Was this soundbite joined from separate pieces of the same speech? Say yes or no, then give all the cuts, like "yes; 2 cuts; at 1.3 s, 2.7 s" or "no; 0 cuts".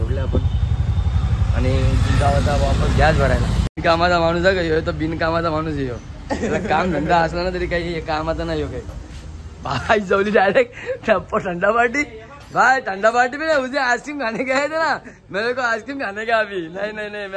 yes; 1 cut; at 3.7 s